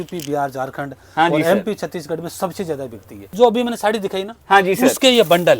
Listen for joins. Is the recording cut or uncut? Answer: cut